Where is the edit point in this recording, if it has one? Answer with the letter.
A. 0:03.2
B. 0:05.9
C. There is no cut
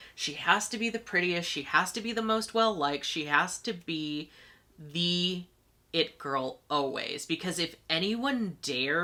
C